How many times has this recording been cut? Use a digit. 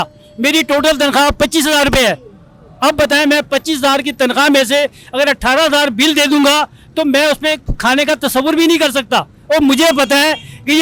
0